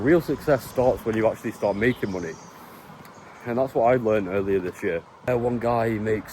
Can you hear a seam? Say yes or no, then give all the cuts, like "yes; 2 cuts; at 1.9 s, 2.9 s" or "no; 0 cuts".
yes; 1 cut; at 5.3 s